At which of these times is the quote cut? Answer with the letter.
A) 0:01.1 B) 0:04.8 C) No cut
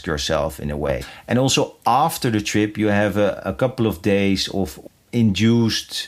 A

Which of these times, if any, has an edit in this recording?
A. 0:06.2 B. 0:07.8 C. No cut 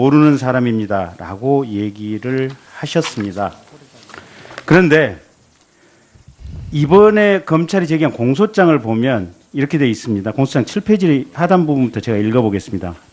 B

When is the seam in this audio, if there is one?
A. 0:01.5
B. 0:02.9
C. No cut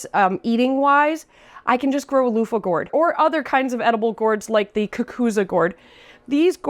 B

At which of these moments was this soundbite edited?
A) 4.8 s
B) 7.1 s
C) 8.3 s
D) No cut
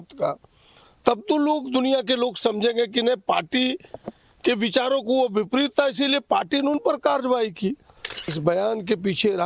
C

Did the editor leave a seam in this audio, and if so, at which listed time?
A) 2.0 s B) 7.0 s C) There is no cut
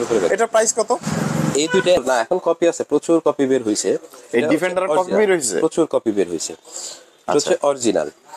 A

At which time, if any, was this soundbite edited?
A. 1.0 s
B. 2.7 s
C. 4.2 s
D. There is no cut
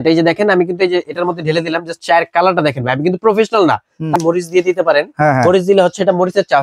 C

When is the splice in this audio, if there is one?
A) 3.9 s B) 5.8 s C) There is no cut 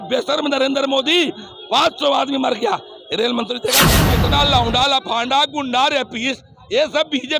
A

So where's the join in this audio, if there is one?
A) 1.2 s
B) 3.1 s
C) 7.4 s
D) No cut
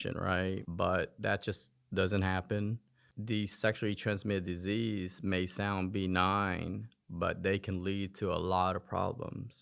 B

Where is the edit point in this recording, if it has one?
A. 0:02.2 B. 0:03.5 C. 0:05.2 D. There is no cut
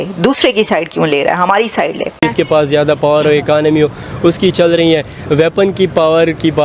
A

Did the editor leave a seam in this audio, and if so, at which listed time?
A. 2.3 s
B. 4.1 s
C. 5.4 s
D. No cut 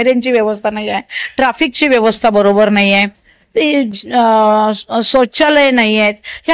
D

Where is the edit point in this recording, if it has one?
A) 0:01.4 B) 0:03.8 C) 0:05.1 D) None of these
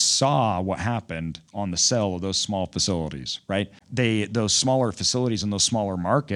B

